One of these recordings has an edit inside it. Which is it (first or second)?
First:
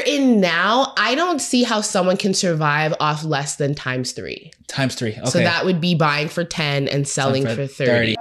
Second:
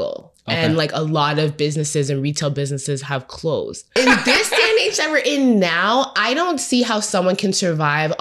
second